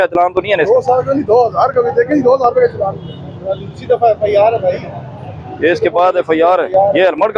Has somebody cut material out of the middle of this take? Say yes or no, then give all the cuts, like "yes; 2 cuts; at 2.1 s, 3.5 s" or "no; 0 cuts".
no; 0 cuts